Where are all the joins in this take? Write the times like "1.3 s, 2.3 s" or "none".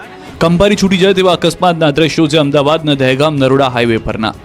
none